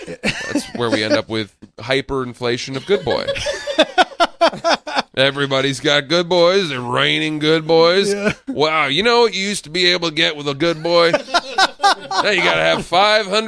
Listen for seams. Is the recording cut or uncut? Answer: cut